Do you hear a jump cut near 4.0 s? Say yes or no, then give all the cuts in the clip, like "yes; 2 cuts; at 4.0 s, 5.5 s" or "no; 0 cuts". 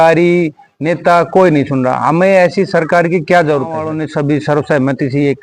yes; 1 cut; at 4.0 s